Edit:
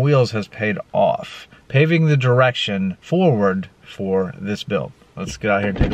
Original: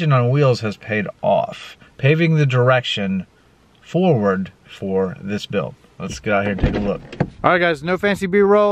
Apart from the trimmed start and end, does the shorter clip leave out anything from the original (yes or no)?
yes